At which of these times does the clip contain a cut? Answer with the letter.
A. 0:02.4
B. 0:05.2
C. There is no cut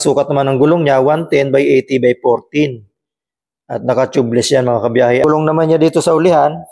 B